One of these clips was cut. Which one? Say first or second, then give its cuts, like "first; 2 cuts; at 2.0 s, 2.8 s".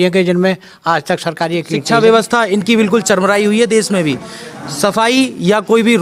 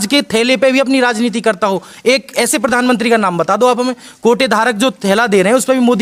first; 1 cut; at 1.8 s